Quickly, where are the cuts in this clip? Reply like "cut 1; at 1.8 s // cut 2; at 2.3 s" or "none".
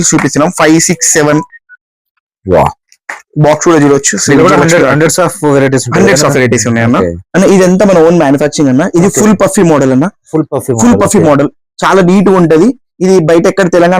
cut 1; at 7.2 s